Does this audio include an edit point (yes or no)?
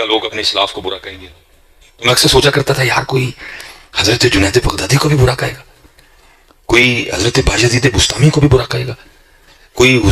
no